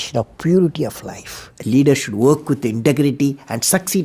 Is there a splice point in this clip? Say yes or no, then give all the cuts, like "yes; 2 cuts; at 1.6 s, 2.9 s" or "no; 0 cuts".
yes; 1 cut; at 1.5 s